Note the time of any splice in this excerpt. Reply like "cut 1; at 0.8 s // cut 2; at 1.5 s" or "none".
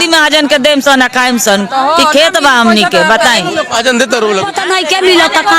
cut 1; at 4.5 s